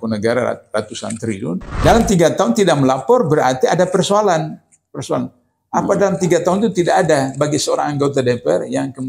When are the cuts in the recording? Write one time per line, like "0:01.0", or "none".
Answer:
0:01.7